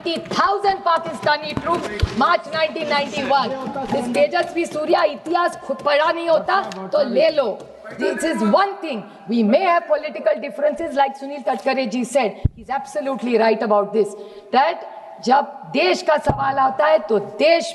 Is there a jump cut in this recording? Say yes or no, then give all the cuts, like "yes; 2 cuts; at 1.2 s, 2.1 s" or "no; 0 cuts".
no; 0 cuts